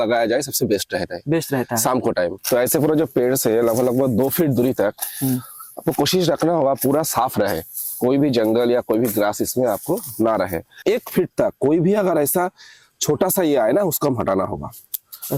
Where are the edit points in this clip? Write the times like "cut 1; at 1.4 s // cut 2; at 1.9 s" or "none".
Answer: cut 1; at 2.4 s // cut 2; at 10.8 s